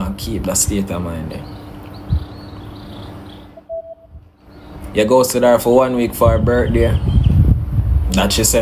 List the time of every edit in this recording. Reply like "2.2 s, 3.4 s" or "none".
none